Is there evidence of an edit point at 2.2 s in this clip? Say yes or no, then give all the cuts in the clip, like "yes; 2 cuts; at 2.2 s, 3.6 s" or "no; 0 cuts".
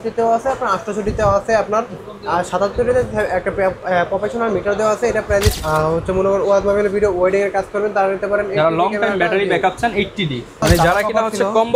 no; 2 cuts; at 5.5 s, 10.6 s